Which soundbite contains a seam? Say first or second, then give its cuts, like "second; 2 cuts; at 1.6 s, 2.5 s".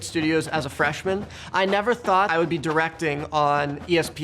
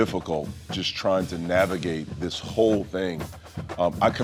first; 1 cut; at 2.3 s